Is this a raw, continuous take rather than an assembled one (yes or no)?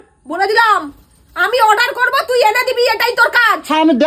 yes